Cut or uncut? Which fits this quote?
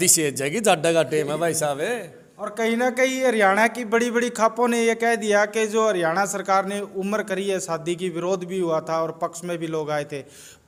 uncut